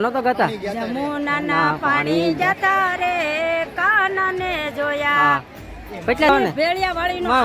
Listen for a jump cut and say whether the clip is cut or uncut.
cut